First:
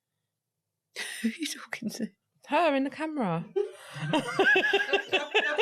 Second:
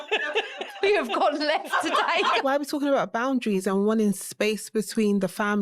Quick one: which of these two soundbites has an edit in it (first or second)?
second